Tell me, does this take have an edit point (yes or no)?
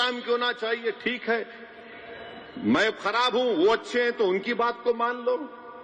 no